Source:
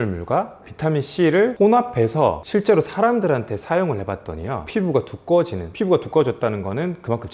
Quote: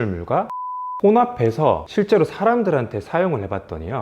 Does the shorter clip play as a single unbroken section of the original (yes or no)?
no